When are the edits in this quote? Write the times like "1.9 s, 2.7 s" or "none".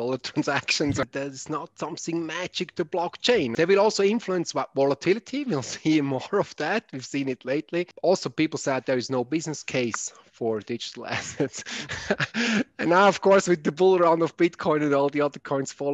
1.0 s, 3.5 s, 7.9 s

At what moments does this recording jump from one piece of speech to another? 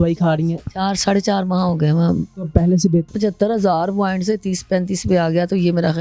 2.3 s, 3.1 s

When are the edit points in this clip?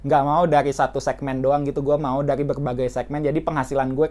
none

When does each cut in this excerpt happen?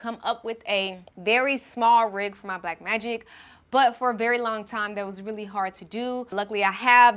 1.0 s, 6.3 s

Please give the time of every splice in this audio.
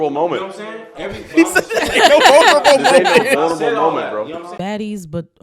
4.5 s

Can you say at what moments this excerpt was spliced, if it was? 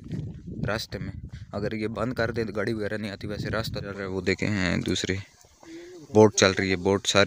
4.1 s

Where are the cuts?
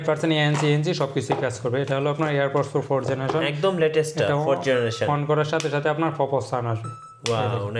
none

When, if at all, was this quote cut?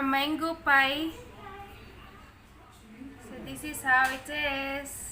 3.0 s

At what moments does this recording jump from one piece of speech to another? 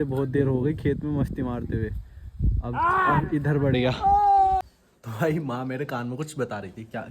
4.6 s

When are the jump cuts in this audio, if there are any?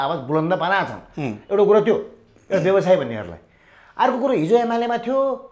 none

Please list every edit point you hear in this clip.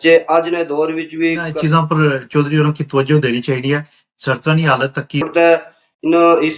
1.5 s, 5.3 s

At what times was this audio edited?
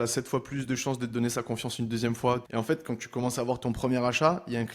2.5 s

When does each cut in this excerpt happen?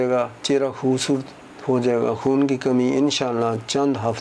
none

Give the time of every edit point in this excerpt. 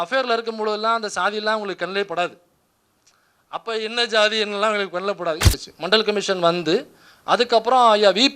5.5 s

